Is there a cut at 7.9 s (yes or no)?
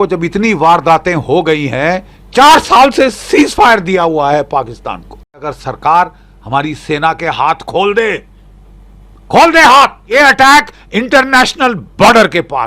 no